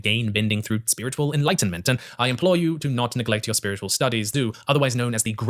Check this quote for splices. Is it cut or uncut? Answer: cut